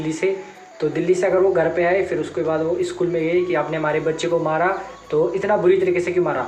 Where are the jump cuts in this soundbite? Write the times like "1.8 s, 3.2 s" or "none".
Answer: none